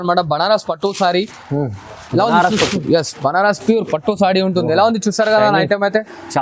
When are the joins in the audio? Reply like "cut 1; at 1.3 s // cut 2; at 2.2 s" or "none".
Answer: none